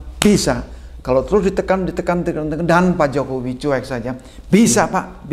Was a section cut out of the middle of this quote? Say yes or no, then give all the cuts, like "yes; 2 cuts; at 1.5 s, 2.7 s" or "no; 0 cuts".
no; 0 cuts